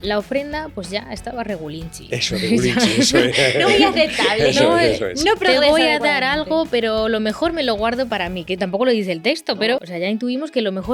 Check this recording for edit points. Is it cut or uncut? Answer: cut